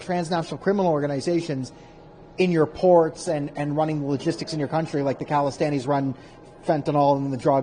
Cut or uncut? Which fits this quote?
uncut